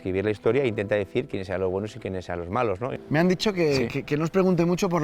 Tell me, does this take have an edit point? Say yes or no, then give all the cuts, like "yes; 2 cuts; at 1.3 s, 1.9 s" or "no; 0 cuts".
yes; 1 cut; at 2.9 s